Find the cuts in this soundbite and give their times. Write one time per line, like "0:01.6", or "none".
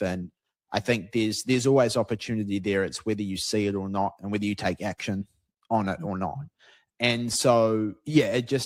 none